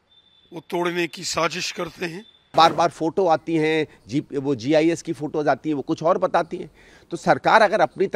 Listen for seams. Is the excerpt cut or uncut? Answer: cut